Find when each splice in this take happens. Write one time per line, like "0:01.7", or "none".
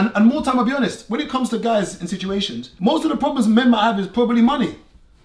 0:02.6